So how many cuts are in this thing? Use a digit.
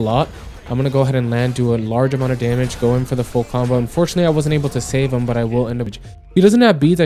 1